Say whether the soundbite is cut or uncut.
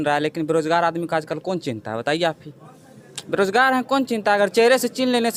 uncut